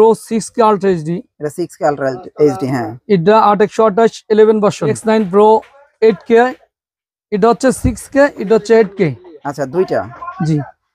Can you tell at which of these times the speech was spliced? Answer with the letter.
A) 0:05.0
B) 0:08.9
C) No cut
A